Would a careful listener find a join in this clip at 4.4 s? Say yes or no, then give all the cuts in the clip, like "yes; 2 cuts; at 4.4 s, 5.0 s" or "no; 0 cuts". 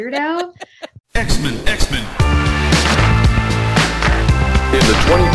no; 1 cut; at 0.9 s